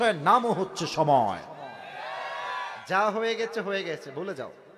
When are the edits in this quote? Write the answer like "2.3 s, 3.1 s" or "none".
2.8 s